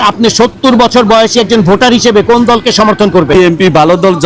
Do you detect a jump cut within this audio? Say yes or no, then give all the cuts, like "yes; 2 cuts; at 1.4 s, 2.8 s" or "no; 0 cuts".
yes; 1 cut; at 3.3 s